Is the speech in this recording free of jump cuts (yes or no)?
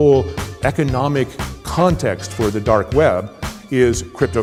yes